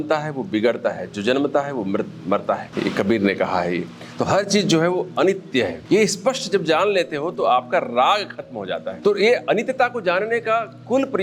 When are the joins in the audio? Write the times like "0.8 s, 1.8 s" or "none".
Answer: 2.7 s, 5.8 s, 8.9 s